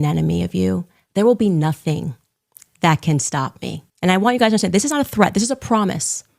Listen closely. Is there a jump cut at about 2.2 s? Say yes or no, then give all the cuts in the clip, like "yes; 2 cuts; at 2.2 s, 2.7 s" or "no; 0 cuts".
no; 2 cuts; at 0.9 s, 3.8 s